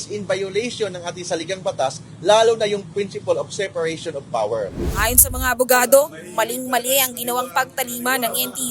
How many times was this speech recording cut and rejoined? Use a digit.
1